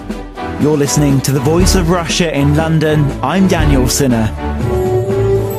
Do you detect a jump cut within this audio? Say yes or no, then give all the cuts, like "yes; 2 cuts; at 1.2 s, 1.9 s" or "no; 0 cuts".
no; 0 cuts